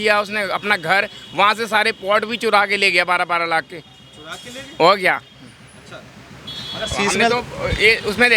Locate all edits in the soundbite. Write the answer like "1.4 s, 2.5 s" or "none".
none